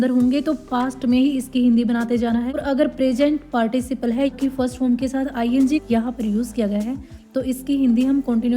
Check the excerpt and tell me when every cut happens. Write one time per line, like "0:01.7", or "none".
0:02.6
0:04.3
0:05.8